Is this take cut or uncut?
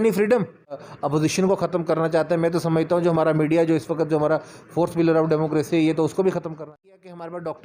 cut